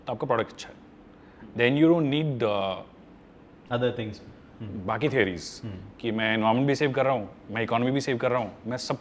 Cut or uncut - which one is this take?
uncut